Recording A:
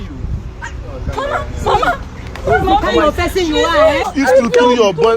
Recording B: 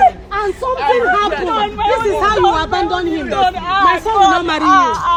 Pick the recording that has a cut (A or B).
A